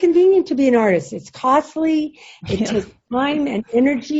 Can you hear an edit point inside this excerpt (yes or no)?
no